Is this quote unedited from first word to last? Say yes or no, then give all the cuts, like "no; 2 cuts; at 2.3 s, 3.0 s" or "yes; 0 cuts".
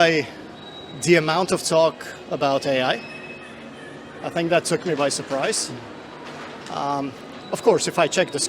yes; 0 cuts